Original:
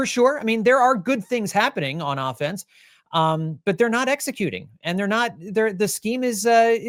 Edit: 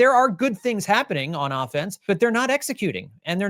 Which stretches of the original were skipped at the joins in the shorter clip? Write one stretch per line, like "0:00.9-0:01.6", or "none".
0:02.6-0:03.5